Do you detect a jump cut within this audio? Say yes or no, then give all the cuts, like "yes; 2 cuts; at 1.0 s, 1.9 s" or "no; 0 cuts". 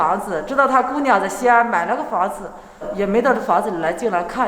yes; 1 cut; at 2.9 s